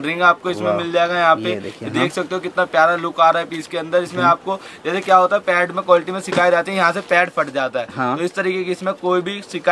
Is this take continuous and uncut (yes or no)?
yes